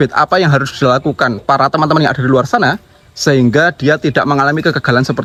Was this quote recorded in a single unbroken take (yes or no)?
yes